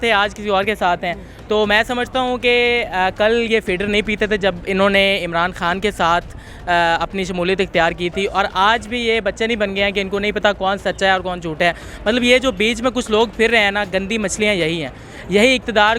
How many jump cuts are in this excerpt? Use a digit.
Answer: 0